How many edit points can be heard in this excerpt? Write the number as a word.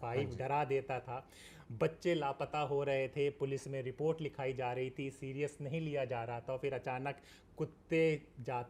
zero